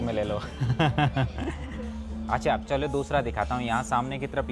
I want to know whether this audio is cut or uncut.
uncut